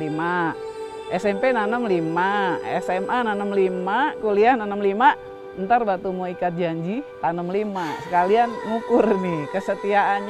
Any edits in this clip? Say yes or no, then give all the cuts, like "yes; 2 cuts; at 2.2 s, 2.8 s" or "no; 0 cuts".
yes; 1 cut; at 7.1 s